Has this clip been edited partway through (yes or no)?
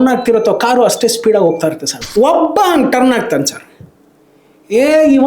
yes